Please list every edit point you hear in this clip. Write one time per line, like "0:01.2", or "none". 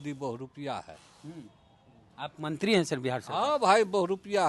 none